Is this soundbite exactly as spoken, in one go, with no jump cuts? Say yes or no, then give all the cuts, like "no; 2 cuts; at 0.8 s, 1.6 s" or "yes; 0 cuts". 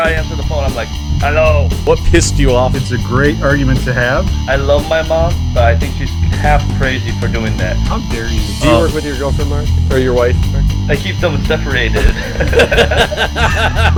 yes; 0 cuts